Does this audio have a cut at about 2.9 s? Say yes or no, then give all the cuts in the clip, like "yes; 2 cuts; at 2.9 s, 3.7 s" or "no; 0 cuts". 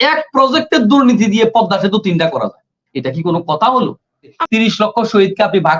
no; 1 cut; at 4.3 s